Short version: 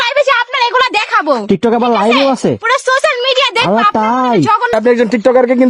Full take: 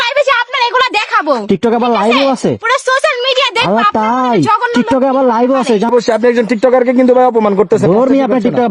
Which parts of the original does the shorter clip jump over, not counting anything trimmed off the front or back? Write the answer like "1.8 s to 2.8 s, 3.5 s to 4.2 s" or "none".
4.7 s to 6.1 s